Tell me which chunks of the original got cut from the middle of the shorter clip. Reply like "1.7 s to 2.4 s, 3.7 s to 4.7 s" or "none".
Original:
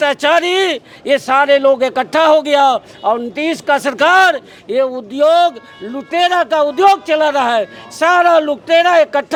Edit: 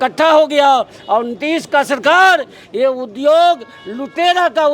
none